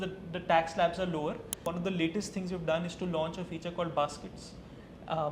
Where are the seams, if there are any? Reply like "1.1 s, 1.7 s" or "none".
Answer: 1.6 s